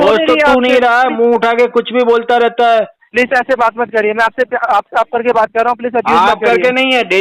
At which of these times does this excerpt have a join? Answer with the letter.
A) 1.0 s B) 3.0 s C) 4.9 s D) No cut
B